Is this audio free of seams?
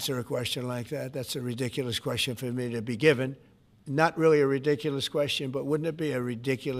yes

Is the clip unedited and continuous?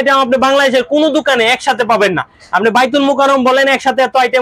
yes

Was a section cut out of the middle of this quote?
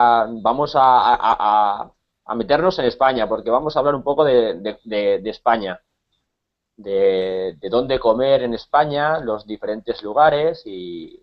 yes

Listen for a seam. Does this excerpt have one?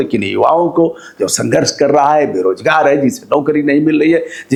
no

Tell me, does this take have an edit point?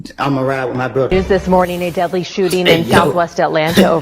yes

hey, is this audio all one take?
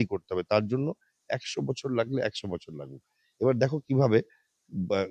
yes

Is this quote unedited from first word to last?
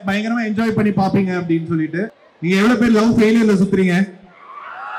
no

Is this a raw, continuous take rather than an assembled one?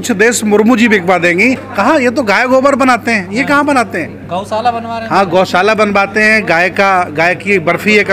no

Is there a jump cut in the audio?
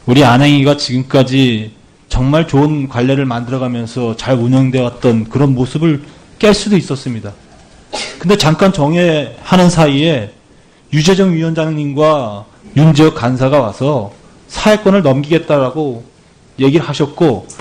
no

